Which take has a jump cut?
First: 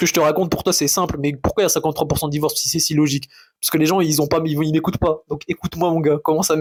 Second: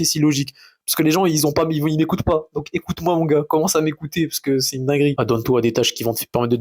second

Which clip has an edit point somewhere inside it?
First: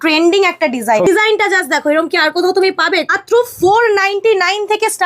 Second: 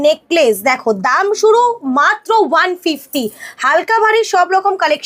first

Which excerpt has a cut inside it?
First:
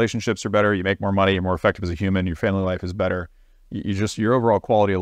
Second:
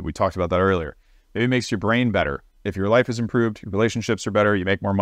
second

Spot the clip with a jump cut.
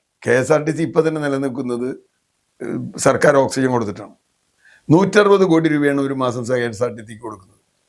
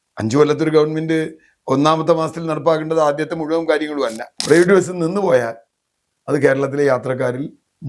second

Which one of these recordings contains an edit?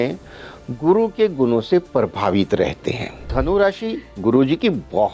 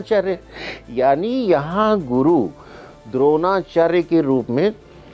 first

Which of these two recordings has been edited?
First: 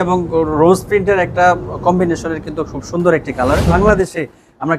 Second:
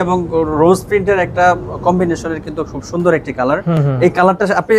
first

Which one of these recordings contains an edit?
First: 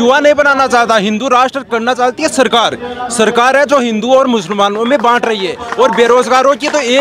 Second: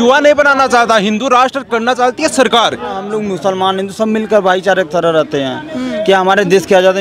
second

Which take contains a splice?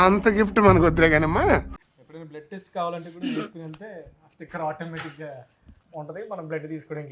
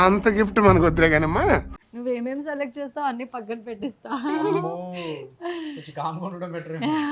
first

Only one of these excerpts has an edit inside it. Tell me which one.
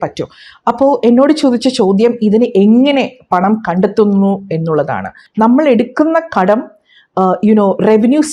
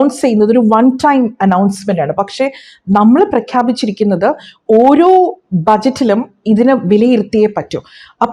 first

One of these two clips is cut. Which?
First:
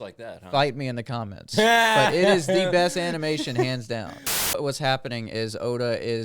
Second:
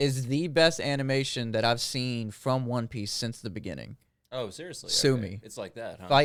first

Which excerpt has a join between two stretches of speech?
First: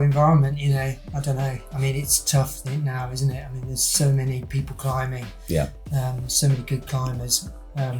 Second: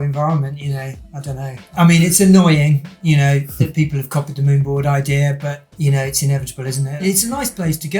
second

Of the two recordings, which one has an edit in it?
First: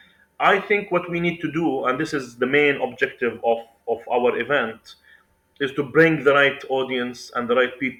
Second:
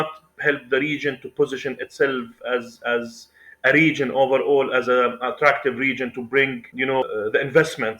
second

